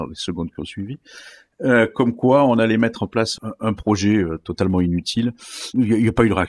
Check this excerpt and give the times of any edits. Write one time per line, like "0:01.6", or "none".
0:03.3